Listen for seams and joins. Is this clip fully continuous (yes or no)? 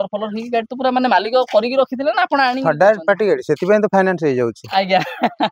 yes